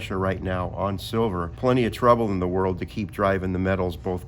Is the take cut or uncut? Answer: cut